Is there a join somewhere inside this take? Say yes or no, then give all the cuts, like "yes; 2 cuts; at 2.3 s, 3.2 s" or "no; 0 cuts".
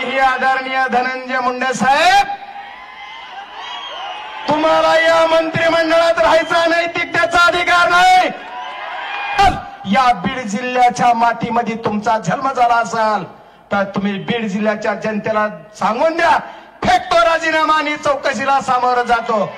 yes; 1 cut; at 9.4 s